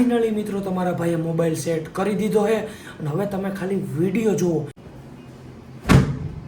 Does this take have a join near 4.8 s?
yes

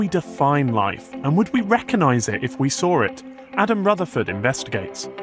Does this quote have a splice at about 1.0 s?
no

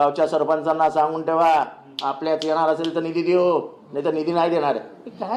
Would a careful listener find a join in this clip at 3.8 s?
no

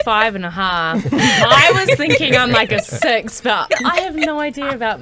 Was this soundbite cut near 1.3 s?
no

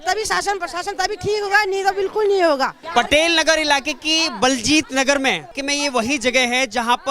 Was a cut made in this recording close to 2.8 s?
yes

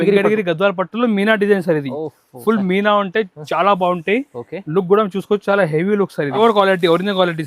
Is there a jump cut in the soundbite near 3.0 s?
no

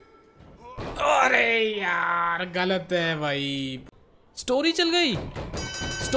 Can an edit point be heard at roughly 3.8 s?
yes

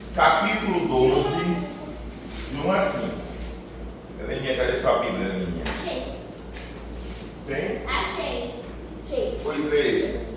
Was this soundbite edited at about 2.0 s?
no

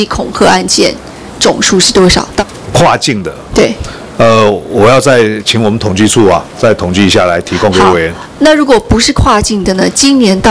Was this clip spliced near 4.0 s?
no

